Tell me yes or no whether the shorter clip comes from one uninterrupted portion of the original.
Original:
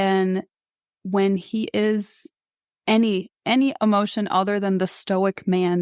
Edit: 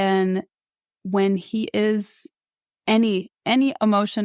yes